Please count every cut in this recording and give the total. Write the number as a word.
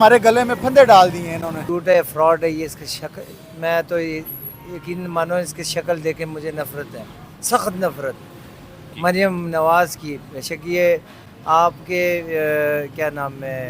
two